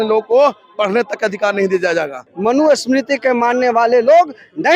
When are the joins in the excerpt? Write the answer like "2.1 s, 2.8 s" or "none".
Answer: 2.2 s